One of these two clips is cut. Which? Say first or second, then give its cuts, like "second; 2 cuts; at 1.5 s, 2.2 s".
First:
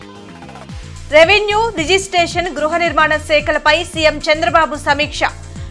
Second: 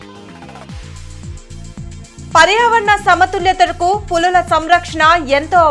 second; 1 cut; at 0.9 s